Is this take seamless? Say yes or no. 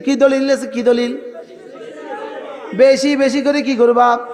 yes